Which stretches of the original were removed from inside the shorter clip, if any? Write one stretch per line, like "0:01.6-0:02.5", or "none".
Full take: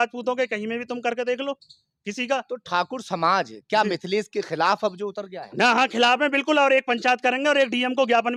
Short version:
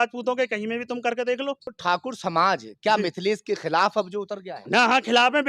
0:01.7-0:02.6